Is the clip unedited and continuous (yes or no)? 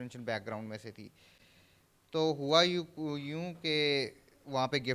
yes